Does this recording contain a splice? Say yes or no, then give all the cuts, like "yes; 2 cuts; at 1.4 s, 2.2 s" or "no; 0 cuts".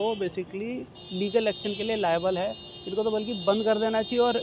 no; 0 cuts